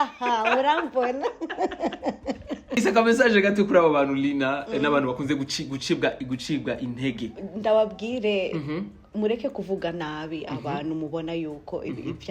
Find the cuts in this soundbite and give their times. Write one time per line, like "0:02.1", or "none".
0:02.8